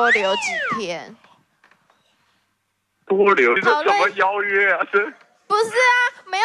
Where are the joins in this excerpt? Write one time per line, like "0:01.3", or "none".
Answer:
0:03.6